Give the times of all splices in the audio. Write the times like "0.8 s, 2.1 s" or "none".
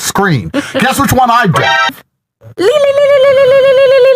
1.9 s